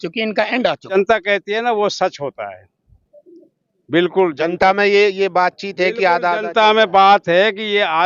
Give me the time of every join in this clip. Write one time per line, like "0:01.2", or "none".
0:00.9